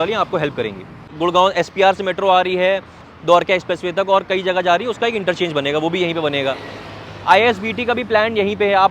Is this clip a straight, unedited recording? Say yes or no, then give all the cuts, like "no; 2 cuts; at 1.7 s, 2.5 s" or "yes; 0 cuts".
no; 1 cut; at 1.0 s